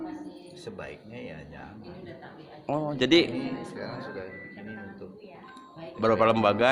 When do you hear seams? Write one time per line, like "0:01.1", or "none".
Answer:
none